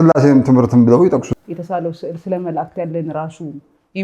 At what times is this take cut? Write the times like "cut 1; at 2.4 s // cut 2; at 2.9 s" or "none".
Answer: cut 1; at 1.3 s